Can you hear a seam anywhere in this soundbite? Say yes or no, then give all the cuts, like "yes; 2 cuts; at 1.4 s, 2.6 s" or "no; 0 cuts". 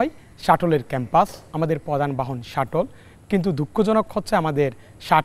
no; 0 cuts